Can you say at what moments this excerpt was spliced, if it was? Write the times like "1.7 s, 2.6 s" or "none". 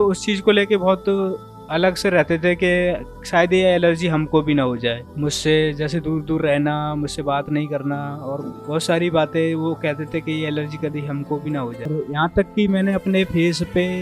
12.0 s